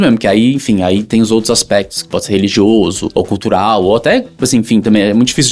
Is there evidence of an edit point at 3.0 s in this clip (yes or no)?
yes